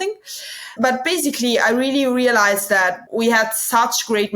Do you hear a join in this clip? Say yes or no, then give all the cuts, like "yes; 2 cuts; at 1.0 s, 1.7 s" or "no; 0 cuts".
yes; 1 cut; at 3.0 s